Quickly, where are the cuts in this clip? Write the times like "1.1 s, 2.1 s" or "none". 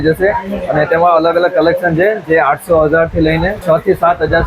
3.6 s

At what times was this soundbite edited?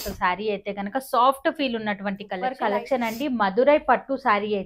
2.4 s

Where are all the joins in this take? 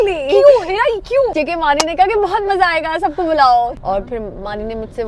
1.3 s, 3.7 s

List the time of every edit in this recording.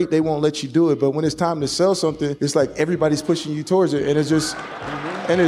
2.3 s

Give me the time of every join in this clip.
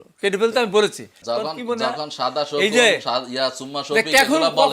1.1 s

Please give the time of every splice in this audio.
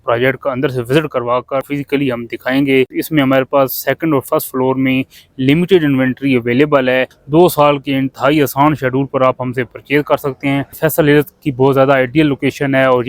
1.7 s, 3.0 s, 7.2 s, 10.8 s

